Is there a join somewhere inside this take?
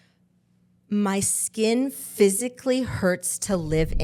no; 0 cuts

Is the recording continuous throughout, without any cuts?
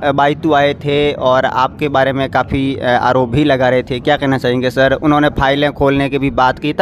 yes; 0 cuts

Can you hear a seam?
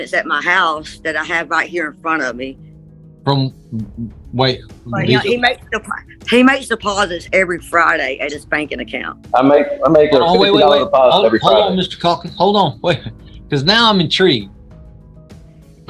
no; 0 cuts

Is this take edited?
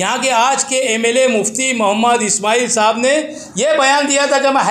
no; 0 cuts

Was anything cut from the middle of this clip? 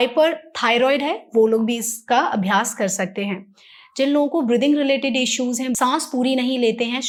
no; 0 cuts

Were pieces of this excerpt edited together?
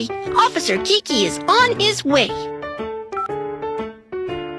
yes; 1 cut; at 3.0 s

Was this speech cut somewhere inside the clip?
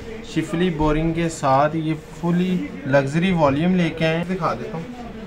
yes; 1 cut; at 4.2 s

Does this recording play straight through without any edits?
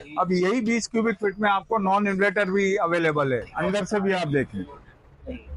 no; 1 cut; at 3.5 s

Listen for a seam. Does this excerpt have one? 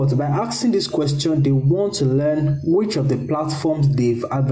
no; 0 cuts

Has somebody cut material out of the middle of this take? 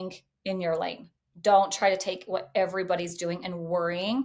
no; 0 cuts

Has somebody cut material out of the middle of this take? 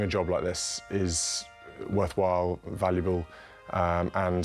no; 0 cuts

